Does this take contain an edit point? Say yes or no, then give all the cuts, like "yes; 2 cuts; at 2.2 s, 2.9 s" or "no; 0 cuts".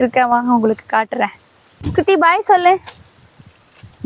yes; 1 cut; at 1.9 s